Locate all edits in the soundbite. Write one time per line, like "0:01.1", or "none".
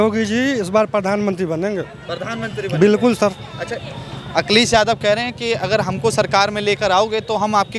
none